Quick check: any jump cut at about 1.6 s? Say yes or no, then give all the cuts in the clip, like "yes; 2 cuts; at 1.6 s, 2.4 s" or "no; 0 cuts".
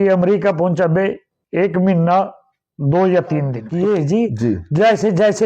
no; 1 cut; at 3.6 s